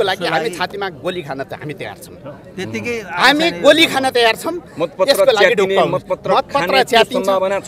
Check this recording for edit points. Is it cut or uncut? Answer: uncut